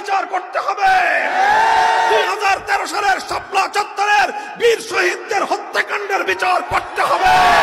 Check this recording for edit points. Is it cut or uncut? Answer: uncut